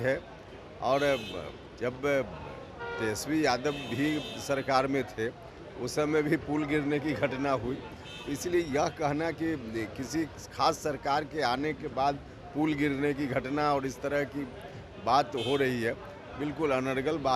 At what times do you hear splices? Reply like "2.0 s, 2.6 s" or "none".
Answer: none